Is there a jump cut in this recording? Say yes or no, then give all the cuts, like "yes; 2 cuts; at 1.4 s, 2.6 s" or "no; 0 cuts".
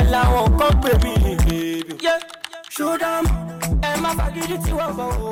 no; 0 cuts